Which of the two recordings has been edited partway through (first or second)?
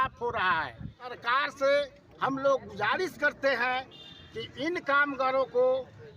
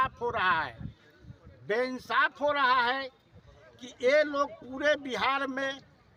first